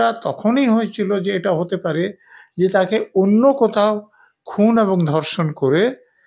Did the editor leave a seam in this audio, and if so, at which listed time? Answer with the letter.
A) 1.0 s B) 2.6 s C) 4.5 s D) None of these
D